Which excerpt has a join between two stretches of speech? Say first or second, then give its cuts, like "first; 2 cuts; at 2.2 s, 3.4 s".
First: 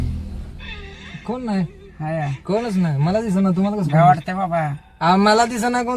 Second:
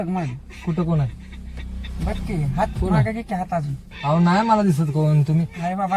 first; 1 cut; at 4.7 s